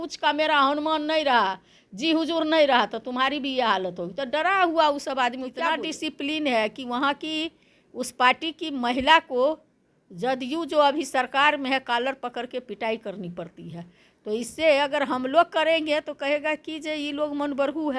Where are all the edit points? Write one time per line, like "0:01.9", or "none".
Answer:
0:05.6